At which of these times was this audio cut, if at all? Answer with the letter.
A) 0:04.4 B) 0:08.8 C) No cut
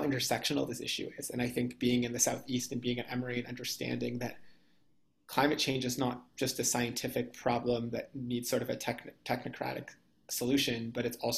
C